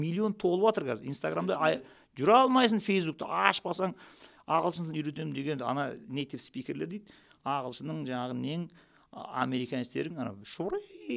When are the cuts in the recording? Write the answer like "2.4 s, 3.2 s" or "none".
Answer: none